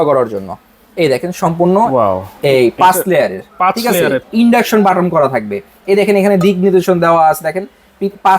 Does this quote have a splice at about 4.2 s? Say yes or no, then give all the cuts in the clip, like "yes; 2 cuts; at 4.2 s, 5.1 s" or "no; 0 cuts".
yes; 1 cut; at 4.2 s